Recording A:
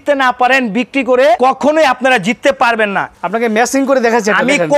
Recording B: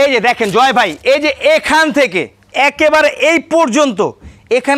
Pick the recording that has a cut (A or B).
A